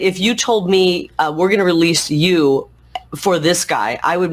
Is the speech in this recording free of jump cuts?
yes; 0 cuts

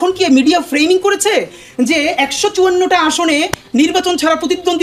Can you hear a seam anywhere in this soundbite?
no; 0 cuts

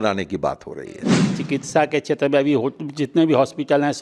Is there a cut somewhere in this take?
yes; 1 cut; at 1.3 s

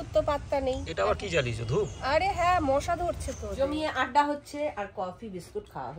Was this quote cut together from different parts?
yes; 1 cut; at 3.4 s

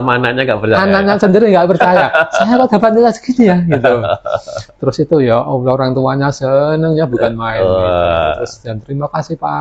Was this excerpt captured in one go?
yes; 0 cuts

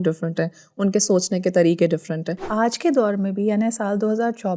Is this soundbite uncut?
no; 1 cut; at 2.5 s

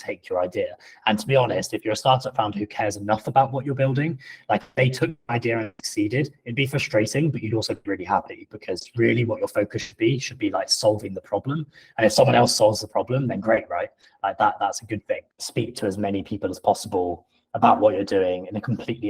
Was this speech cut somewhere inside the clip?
yes; 1 cut; at 15.4 s

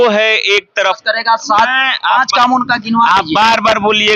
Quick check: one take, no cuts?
no; 1 cut; at 1.0 s

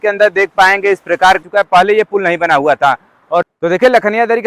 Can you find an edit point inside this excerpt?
yes; 2 cuts; at 1.4 s, 3.5 s

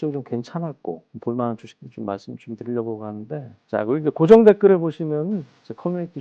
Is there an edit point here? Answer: yes; 1 cut; at 3.6 s

